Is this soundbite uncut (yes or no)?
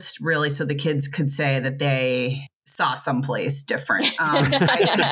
yes